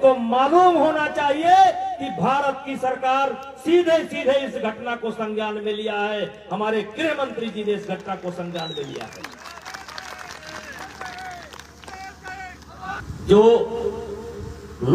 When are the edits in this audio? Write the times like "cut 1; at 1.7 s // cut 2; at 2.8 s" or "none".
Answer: cut 1; at 13.0 s